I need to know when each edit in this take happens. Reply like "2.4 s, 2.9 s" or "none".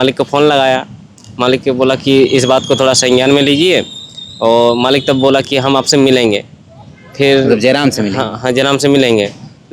none